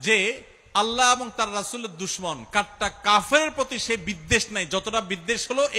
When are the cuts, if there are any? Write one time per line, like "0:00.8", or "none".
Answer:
none